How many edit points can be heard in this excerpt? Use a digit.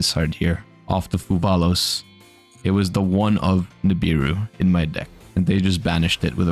1